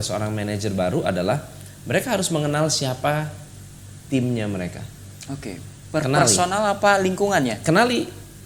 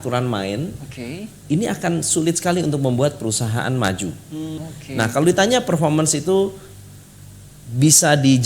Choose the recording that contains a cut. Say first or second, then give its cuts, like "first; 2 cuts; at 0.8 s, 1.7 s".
second; 1 cut; at 4.6 s